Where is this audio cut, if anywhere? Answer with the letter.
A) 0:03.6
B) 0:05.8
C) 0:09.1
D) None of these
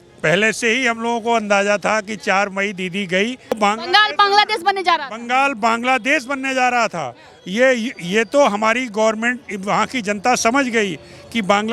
A